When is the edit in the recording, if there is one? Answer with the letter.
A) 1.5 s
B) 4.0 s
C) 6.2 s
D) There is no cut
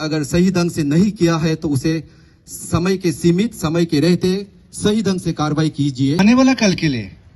C